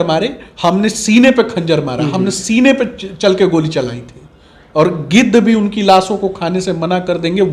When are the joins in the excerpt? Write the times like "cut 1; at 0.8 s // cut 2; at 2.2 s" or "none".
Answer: none